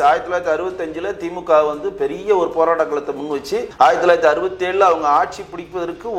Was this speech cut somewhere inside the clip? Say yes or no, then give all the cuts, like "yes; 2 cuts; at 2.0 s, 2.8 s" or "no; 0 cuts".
no; 0 cuts